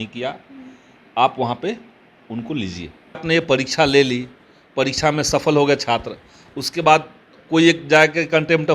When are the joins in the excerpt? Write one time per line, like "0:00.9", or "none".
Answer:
0:03.2

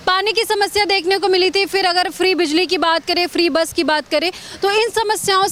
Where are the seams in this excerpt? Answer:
none

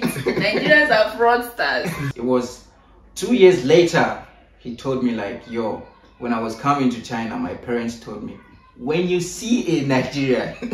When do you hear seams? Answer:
0:02.0

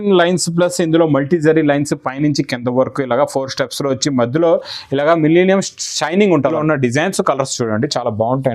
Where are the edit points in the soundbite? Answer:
0:06.6

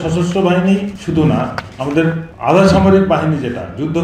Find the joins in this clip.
0:01.0
0:02.3

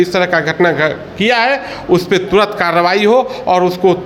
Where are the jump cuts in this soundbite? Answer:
none

